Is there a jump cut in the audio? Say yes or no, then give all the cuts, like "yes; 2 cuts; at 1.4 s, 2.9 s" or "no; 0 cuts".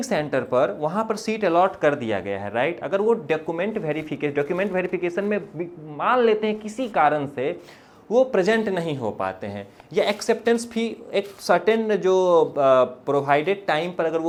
no; 0 cuts